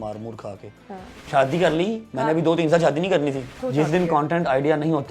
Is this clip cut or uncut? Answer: cut